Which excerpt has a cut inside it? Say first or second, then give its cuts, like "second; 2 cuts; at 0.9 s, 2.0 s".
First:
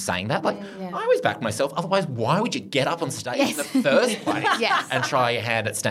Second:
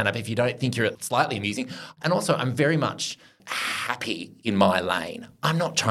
second; 2 cuts; at 1.0 s, 1.9 s